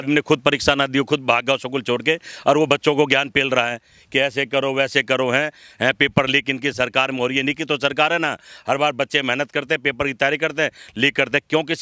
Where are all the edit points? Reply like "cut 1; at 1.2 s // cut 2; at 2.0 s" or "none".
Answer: none